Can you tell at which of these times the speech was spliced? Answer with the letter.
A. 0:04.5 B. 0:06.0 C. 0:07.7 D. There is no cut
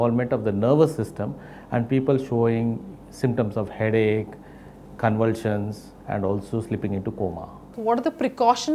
C